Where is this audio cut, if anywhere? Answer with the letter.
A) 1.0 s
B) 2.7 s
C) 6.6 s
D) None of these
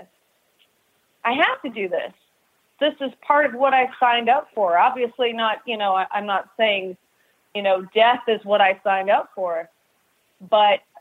B